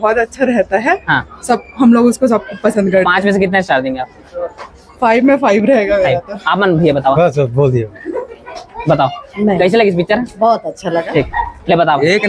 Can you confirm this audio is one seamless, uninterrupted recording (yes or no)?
yes